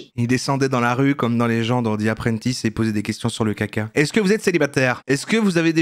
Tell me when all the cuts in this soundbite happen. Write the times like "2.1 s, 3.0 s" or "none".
none